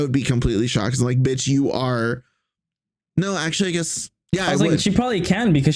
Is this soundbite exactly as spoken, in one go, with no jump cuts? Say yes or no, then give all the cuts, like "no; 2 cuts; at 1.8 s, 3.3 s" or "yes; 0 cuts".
yes; 0 cuts